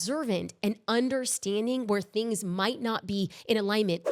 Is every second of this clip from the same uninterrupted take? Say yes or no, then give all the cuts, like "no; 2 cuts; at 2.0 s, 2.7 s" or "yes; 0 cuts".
yes; 0 cuts